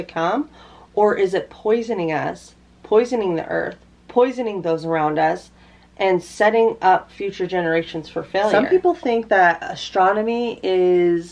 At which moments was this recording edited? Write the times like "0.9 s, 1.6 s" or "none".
8.5 s